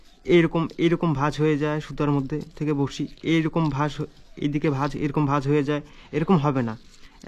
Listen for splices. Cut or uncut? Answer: uncut